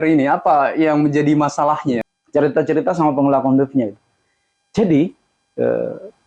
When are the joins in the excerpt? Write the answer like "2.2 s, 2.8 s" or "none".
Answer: 2.1 s